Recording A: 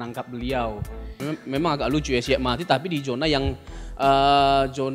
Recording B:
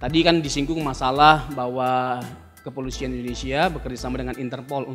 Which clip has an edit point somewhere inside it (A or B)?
A